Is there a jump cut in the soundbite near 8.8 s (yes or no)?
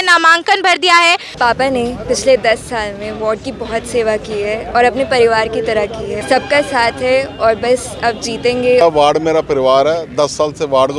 yes